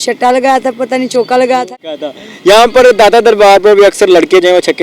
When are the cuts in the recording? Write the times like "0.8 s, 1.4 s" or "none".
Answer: 1.7 s